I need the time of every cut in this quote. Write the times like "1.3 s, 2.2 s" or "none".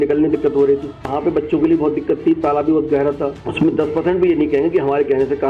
1.1 s, 3.4 s